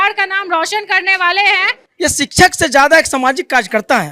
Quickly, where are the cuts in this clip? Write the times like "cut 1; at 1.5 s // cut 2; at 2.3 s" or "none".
cut 1; at 1.8 s